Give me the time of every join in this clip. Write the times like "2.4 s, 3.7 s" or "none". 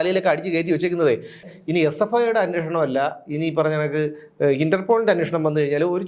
1.5 s